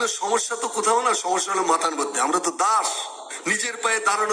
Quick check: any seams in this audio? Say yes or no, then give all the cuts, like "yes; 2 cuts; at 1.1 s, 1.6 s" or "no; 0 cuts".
yes; 1 cut; at 3.3 s